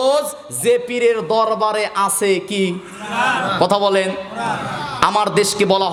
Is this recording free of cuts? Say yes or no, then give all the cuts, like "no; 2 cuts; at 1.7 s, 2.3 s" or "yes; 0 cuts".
yes; 0 cuts